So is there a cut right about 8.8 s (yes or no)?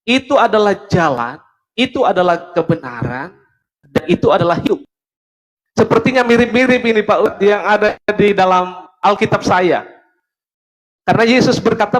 yes